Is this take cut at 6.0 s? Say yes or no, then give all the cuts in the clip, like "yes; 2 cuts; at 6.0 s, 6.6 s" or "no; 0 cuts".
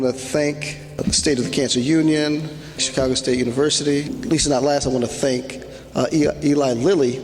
no; 3 cuts; at 1.0 s, 2.9 s, 4.1 s